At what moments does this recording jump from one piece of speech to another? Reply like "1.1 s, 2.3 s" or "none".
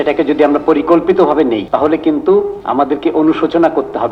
1.6 s, 2.6 s